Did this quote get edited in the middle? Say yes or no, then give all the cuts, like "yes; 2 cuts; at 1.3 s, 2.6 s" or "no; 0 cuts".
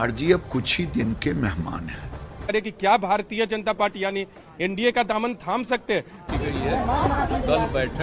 yes; 2 cuts; at 2.5 s, 6.2 s